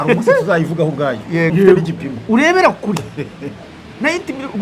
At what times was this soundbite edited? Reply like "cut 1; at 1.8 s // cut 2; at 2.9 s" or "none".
cut 1; at 1.5 s